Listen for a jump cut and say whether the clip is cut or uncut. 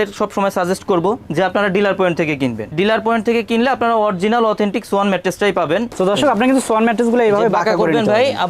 cut